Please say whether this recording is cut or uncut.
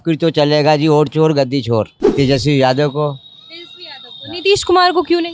cut